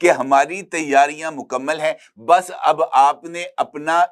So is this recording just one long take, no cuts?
yes; 0 cuts

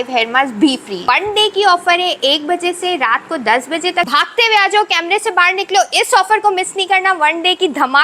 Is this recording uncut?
no; 2 cuts; at 0.9 s, 4.1 s

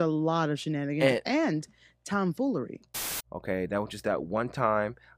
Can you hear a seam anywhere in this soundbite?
yes; 1 cut; at 2.8 s

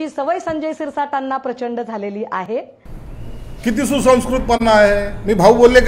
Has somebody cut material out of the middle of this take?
yes; 1 cut; at 2.5 s

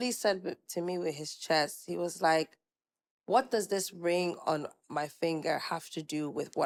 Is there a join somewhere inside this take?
no; 0 cuts

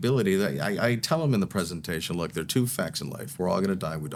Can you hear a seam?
no; 0 cuts

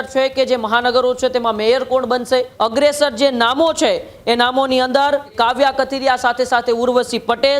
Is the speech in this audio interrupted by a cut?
yes; 2 cuts; at 2.5 s, 5.3 s

